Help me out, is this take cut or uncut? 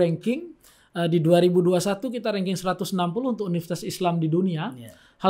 uncut